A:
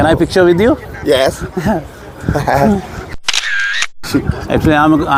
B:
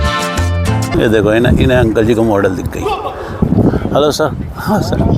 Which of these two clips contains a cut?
B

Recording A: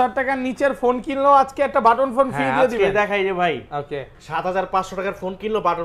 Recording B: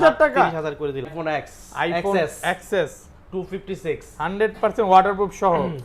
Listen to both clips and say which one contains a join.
B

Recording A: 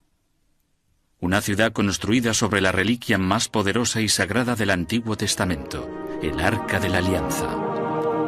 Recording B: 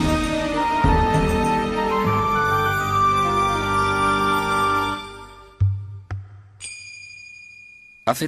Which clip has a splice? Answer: A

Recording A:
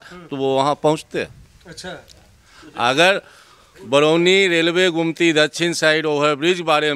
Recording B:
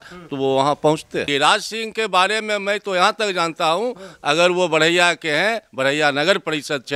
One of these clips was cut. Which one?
B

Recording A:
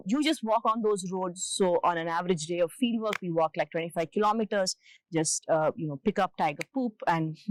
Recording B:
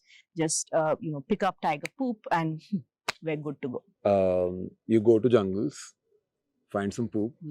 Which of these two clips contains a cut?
B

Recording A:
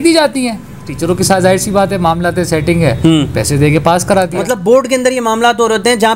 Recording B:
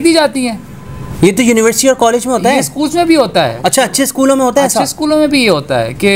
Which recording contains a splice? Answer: A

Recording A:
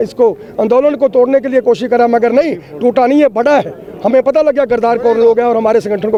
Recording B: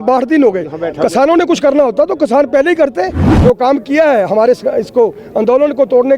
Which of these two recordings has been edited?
B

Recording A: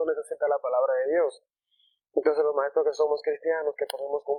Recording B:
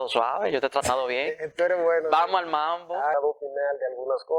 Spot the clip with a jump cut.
B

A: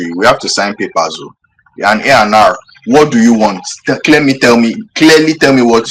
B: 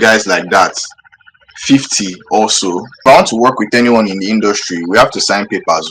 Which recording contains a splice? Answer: B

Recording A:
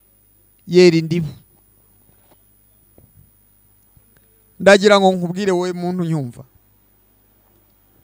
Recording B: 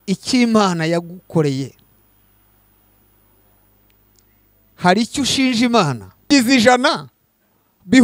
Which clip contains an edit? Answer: B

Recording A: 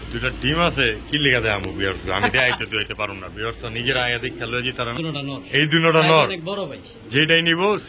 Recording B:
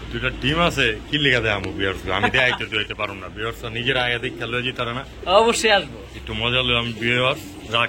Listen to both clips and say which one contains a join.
A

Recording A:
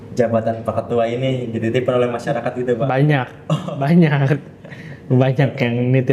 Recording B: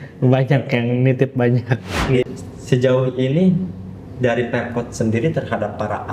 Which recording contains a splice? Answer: B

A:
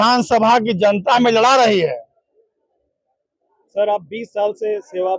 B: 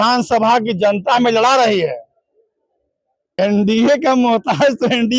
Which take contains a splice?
B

